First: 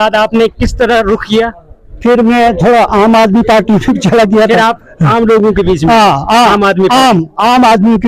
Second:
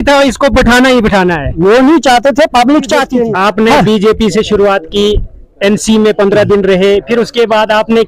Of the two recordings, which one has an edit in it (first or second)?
second